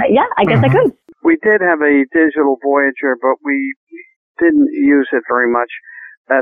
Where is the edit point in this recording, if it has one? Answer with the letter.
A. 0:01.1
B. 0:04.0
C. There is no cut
A